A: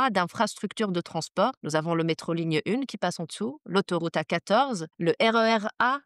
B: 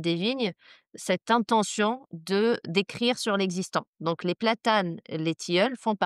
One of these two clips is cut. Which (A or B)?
A